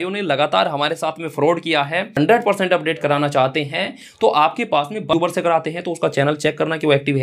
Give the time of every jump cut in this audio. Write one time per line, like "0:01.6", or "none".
0:02.1
0:05.1